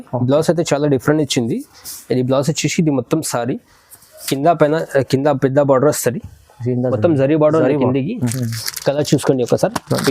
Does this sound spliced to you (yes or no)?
yes